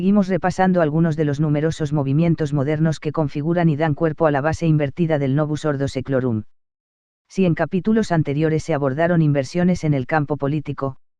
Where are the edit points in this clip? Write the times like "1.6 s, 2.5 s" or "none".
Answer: none